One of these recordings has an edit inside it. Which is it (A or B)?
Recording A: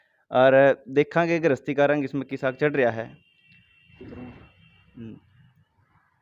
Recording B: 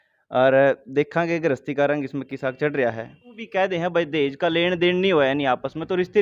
B